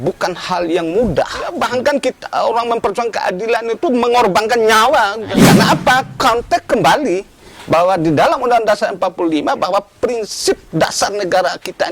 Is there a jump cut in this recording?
yes; 2 cuts; at 1.5 s, 5.3 s

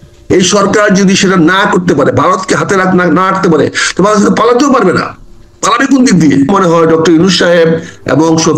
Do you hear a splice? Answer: yes; 1 cut; at 6.5 s

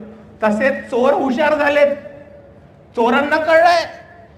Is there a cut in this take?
no; 0 cuts

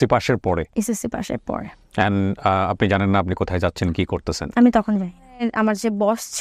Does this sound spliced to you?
yes; 1 cut; at 5.4 s

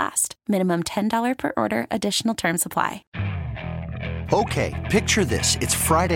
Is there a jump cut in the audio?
yes; 1 cut; at 3.1 s

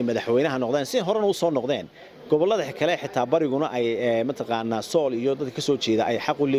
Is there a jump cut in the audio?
no; 0 cuts

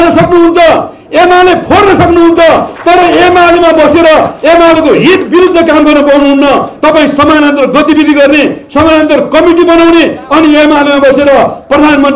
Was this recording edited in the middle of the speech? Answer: no; 0 cuts

